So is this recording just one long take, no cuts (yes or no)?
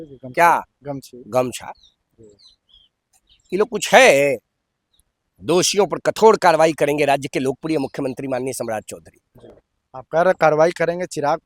yes